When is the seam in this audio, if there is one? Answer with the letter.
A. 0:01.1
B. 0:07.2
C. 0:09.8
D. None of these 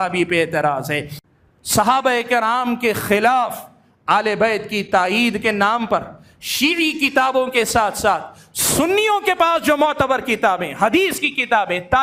A